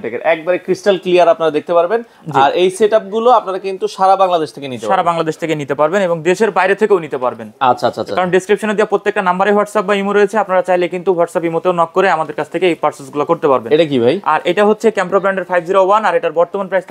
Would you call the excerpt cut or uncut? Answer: uncut